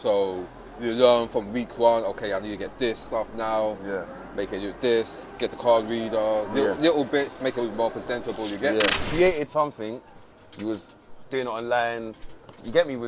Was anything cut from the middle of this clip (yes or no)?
yes